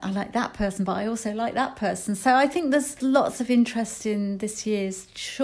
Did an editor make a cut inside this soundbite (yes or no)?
yes